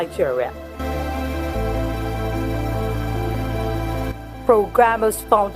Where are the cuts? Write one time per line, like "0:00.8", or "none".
0:04.3